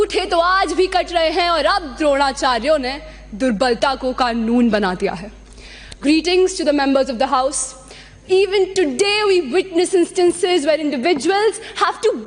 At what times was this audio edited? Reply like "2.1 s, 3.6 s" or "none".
none

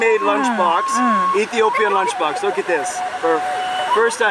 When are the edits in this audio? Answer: none

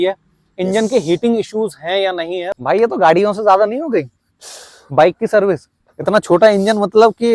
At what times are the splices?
2.4 s

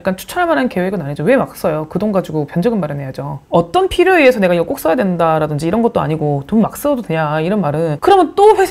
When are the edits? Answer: 3.4 s

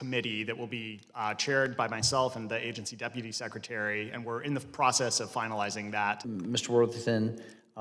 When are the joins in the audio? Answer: none

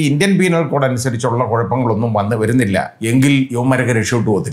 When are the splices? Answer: 2.9 s, 3.5 s

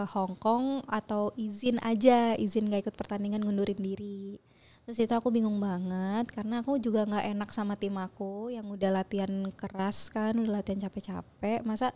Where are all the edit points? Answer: none

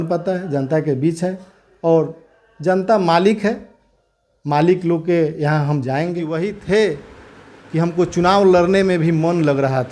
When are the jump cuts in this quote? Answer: 6.3 s

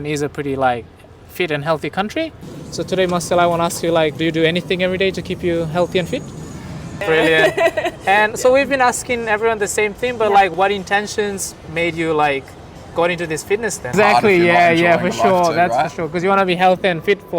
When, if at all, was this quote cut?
2.5 s, 7.0 s, 13.9 s

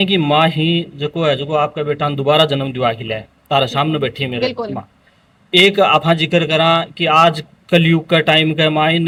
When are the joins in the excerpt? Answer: none

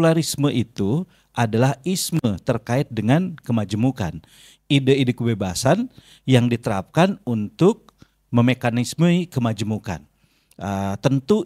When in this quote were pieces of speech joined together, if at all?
none

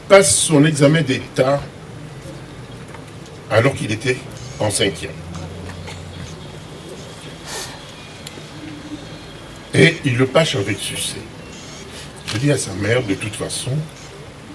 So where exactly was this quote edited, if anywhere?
none

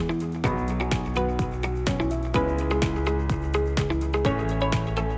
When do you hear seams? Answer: none

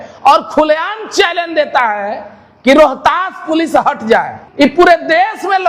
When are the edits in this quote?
4.4 s

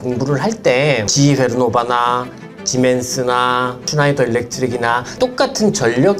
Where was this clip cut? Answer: none

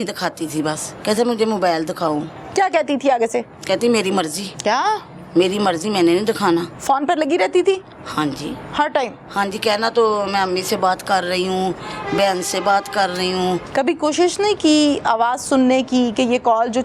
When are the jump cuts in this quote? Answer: 0.9 s, 4.4 s, 6.7 s, 13.7 s

